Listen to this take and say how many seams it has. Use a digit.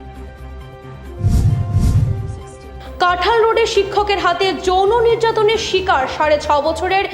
0